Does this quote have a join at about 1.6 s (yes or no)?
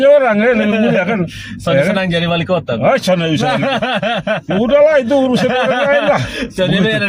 no